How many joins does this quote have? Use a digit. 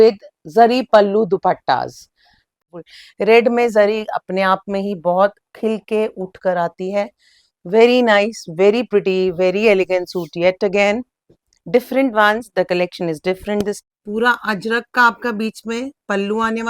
2